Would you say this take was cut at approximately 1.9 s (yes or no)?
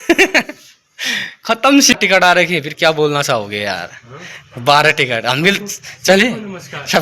yes